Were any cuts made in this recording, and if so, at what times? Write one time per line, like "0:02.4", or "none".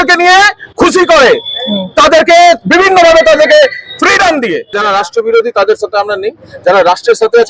0:04.7